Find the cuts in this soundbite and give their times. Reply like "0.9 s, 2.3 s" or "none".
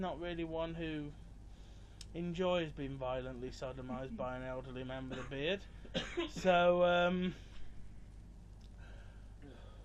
8.2 s